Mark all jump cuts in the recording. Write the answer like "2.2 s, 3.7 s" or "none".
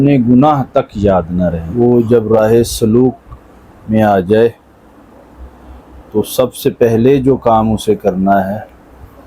1.6 s